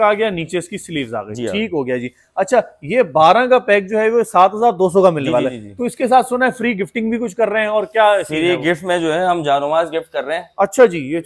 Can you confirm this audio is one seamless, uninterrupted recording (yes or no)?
yes